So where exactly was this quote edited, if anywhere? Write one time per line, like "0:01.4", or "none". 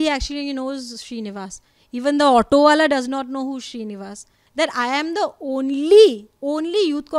0:04.4

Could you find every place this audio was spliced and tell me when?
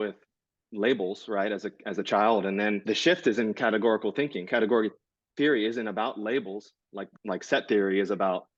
none

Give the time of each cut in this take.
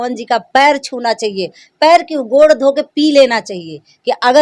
none

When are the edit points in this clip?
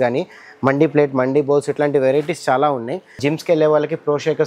0:03.2

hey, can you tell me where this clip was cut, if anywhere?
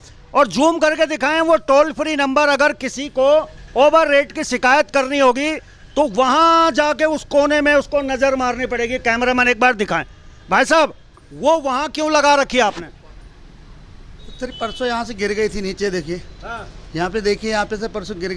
none

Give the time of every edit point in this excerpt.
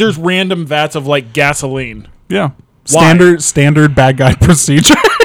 none

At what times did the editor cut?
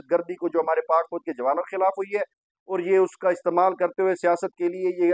none

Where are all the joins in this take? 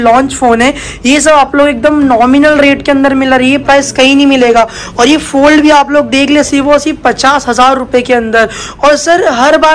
none

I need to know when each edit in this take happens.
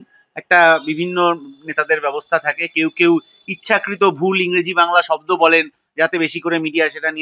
none

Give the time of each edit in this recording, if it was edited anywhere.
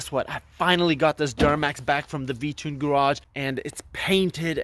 0:03.3

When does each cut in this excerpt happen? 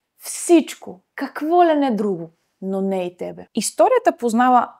0:03.4

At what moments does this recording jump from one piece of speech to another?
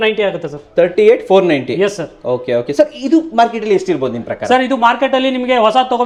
none

